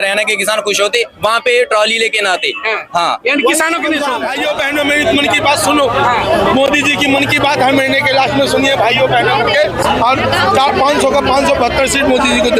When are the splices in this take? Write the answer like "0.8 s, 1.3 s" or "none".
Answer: 4.3 s